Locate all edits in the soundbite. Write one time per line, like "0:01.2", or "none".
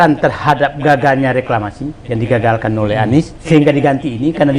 0:03.4